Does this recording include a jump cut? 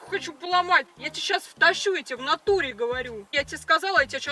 yes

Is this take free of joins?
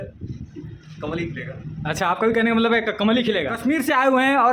yes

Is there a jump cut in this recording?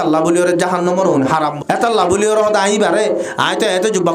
yes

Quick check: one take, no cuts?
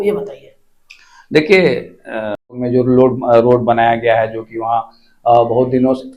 no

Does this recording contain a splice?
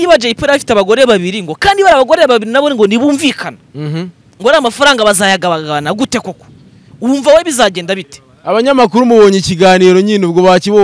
no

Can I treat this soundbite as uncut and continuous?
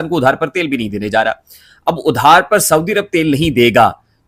yes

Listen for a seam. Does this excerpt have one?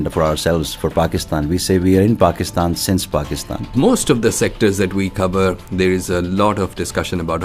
yes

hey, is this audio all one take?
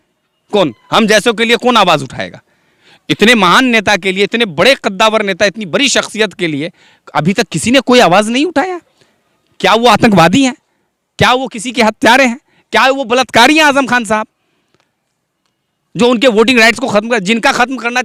yes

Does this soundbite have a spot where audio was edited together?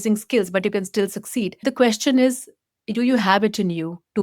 yes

